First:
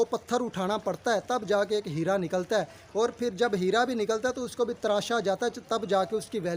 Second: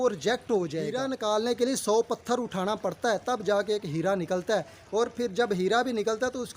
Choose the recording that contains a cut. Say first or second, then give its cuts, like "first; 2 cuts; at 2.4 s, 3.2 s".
second; 1 cut; at 1.0 s